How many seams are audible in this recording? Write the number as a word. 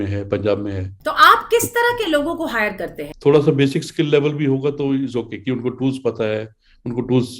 two